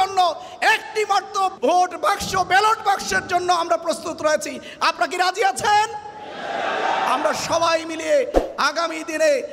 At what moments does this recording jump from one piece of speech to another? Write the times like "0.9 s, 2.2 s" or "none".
none